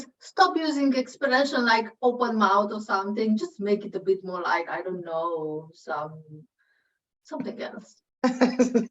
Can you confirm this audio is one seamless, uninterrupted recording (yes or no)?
no